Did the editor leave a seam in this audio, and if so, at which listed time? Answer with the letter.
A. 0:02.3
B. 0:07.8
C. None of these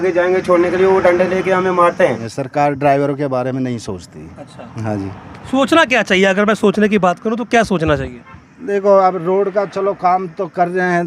A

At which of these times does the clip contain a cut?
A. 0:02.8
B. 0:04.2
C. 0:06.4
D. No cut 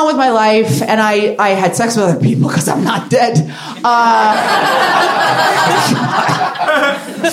D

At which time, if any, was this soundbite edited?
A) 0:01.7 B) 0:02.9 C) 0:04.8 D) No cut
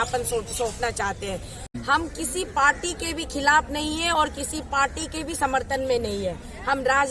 A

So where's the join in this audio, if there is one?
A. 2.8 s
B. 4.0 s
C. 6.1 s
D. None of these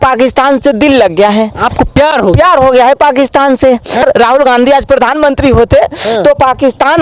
B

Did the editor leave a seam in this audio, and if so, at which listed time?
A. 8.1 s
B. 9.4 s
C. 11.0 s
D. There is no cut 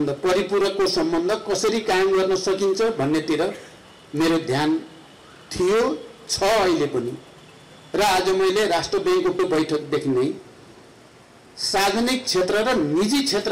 B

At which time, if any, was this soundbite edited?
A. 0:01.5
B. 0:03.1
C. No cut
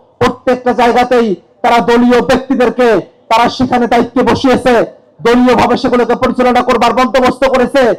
C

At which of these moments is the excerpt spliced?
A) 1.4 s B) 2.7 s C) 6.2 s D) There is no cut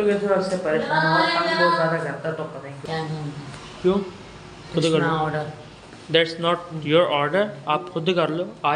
B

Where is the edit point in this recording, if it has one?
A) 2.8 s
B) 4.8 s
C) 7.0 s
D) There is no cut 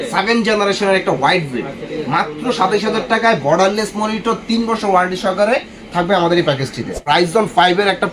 C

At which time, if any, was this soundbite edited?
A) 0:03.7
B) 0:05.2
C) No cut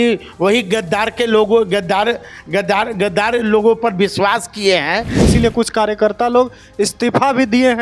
B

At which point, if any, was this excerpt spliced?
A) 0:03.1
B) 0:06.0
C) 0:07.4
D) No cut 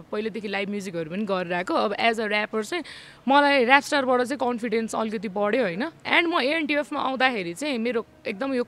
D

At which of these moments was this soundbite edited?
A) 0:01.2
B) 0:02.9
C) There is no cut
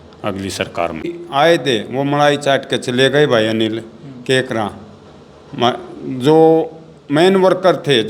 A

